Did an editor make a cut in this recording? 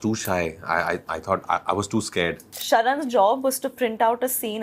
yes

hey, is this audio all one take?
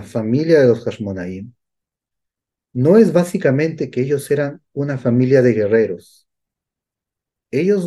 yes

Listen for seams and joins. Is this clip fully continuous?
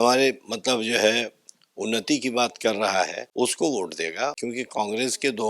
no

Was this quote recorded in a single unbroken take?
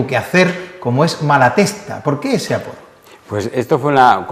no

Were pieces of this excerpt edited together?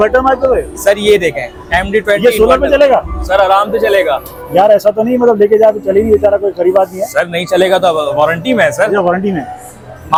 no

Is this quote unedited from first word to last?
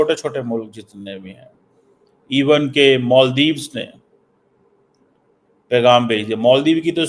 yes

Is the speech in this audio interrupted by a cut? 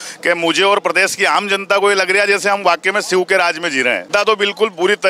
yes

